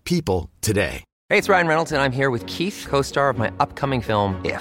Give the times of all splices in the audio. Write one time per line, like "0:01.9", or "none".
0:01.1